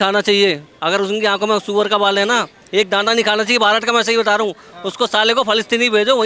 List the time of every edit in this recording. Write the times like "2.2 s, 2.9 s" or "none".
none